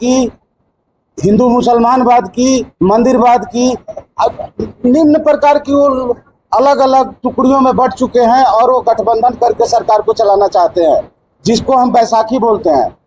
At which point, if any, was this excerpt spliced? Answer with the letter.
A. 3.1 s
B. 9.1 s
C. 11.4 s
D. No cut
D